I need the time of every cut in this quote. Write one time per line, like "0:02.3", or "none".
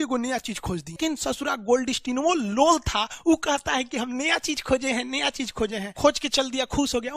0:01.0
0:05.9

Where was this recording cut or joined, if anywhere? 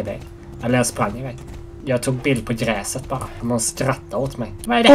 0:01.8

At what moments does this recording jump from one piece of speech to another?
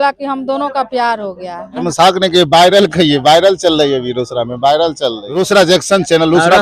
0:01.9
0:05.3

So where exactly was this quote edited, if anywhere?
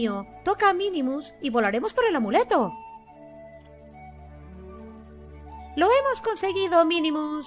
0:02.7
0:05.7

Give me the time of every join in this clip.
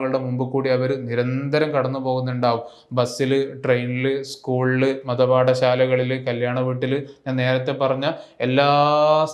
none

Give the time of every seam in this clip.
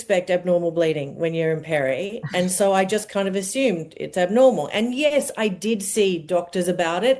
none

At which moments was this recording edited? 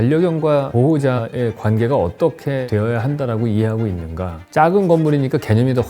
0:01.0
0:02.6
0:04.4

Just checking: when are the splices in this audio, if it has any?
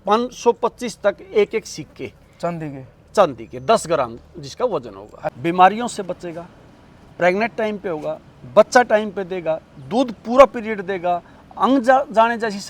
0:05.3

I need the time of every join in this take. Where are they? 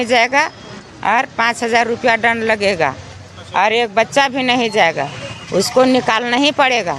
none

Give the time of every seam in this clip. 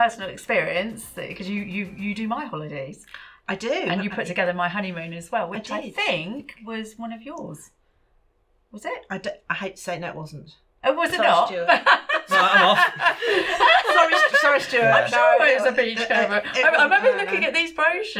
none

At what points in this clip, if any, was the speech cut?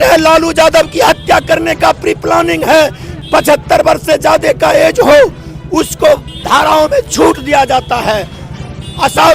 0:03.1

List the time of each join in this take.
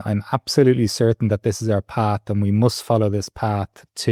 none

